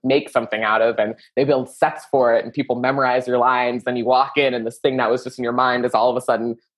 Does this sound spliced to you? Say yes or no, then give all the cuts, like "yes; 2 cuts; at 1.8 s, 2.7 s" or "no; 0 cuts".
no; 0 cuts